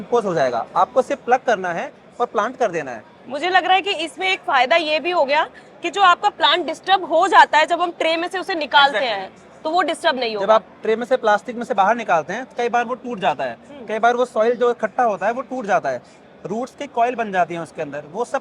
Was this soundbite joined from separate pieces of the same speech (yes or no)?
no